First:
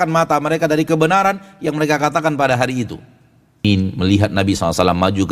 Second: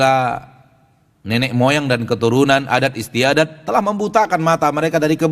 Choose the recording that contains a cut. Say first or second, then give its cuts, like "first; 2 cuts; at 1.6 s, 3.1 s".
first; 1 cut; at 3.6 s